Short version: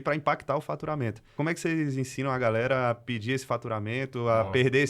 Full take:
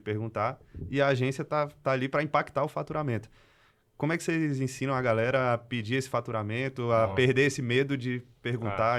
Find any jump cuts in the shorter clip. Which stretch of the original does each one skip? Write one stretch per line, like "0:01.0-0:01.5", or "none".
0:03.3-0:03.9